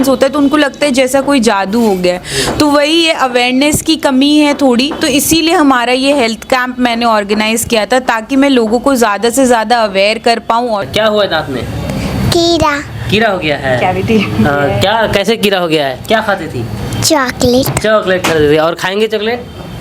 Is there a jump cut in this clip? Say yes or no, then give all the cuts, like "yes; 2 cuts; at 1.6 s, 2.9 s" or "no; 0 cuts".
yes; 1 cut; at 10.9 s